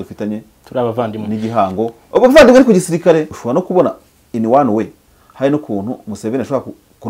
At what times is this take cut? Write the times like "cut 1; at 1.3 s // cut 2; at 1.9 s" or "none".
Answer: cut 1; at 3.4 s